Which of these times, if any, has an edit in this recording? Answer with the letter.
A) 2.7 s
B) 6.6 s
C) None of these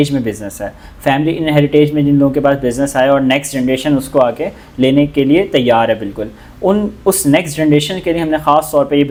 C